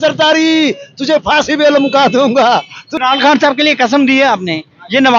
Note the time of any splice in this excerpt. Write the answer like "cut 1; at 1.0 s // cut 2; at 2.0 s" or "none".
cut 1; at 2.8 s